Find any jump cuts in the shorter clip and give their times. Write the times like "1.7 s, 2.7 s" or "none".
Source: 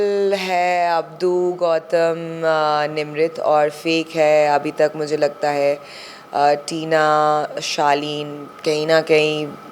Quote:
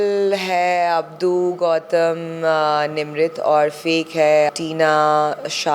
4.5 s